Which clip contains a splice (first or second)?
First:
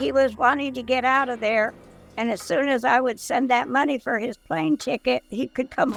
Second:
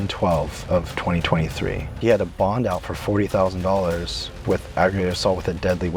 second